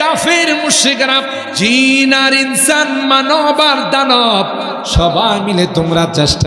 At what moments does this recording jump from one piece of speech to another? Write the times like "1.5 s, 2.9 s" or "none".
1.5 s